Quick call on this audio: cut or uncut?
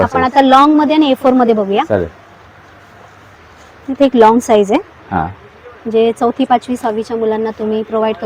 uncut